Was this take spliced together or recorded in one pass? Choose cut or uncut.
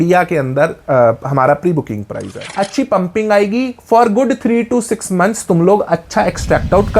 cut